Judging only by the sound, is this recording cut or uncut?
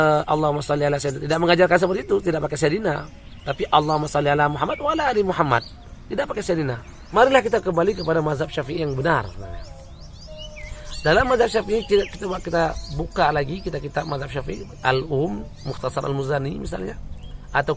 cut